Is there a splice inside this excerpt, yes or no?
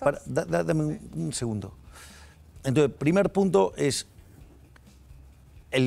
no